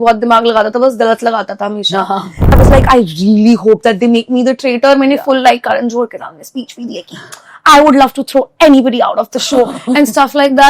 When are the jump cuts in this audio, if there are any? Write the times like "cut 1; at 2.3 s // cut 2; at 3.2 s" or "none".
cut 1; at 2.5 s